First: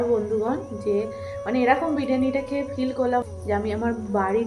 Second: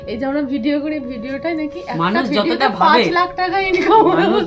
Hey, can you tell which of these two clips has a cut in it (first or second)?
first